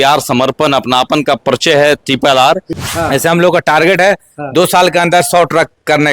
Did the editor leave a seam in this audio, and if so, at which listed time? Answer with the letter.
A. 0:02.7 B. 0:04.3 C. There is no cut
A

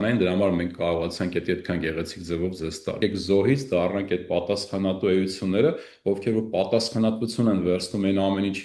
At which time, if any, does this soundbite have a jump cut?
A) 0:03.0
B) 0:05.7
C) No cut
A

